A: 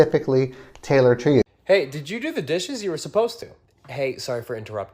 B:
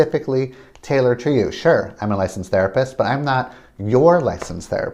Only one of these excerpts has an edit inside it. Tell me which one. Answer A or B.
A